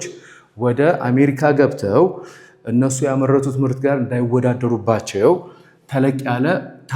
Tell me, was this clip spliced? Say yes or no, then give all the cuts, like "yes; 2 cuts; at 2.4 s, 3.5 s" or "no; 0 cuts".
no; 0 cuts